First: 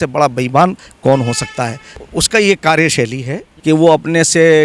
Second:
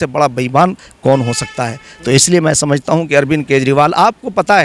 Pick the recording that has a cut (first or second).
first